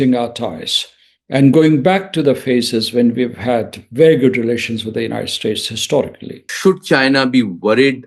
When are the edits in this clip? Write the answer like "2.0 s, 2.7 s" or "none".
6.5 s

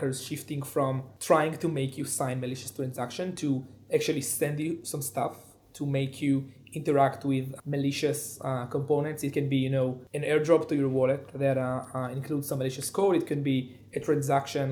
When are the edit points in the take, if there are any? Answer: none

